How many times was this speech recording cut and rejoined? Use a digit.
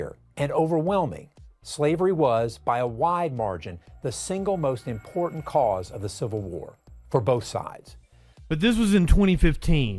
0